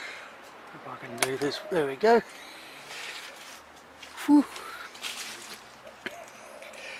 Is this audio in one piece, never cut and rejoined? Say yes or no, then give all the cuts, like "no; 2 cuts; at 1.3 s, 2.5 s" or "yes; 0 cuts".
yes; 0 cuts